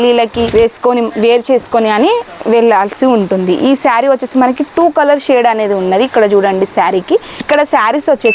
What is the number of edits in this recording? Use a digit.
1